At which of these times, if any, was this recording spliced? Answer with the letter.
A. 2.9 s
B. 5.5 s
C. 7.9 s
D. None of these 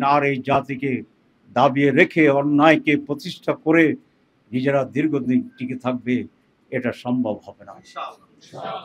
D